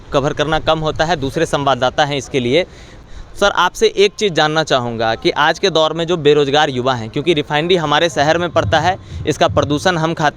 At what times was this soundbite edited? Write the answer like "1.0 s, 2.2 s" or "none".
2.9 s